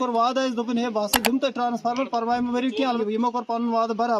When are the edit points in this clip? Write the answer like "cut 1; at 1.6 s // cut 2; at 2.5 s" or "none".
cut 1; at 3.0 s

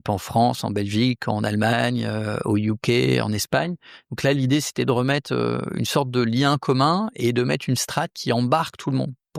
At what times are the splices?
none

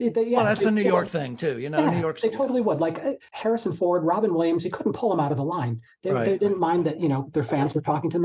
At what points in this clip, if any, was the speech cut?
cut 1; at 3.2 s

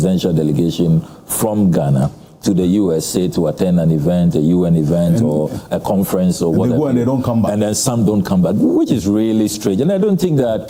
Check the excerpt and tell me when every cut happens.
none

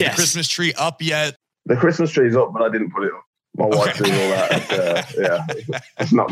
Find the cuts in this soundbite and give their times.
cut 1; at 1.5 s

